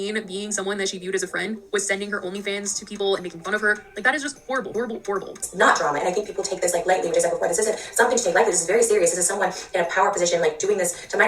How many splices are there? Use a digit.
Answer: 1